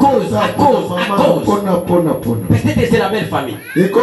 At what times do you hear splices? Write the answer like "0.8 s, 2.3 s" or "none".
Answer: none